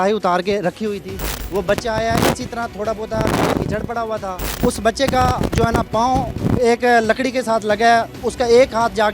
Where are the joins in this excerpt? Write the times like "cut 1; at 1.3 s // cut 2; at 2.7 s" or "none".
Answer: cut 1; at 1.4 s // cut 2; at 4.6 s